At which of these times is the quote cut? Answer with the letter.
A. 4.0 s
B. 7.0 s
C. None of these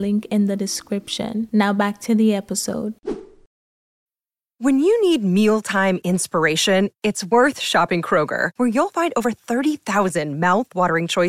A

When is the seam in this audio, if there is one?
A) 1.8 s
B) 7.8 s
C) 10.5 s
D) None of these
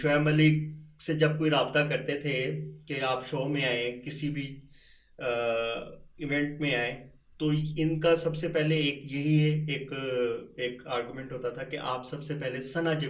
D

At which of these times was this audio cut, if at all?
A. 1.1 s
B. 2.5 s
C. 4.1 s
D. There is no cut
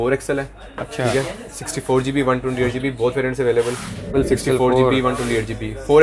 C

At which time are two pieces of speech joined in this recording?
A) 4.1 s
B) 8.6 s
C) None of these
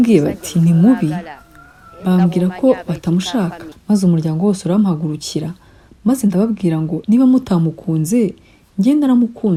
C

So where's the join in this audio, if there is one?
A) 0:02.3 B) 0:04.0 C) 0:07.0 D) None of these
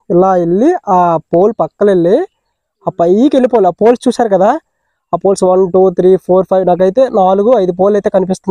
D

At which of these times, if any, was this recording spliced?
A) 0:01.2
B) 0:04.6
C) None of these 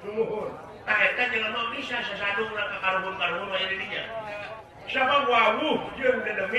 B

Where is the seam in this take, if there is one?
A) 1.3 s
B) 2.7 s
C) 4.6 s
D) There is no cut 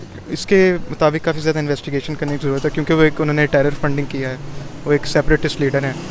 D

